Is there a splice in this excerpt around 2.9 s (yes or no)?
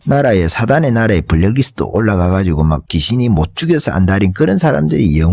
yes